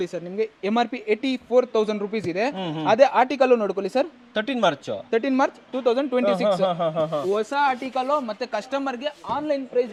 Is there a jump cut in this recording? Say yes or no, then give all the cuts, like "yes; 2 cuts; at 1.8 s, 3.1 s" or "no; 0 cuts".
no; 0 cuts